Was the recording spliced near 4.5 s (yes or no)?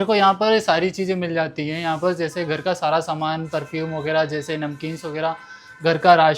no